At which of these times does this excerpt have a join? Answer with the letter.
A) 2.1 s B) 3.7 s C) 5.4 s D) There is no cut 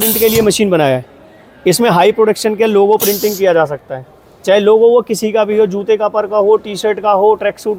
D